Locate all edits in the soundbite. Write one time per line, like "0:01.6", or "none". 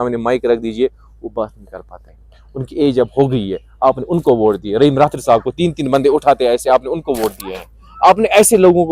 none